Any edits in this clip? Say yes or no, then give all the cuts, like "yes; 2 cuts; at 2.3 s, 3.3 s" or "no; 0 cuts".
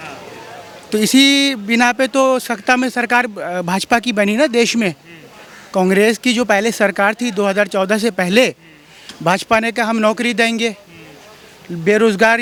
no; 0 cuts